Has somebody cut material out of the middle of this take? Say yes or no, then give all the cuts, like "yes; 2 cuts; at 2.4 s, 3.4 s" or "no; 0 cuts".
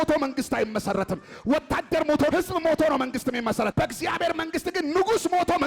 yes; 2 cuts; at 2.3 s, 3.7 s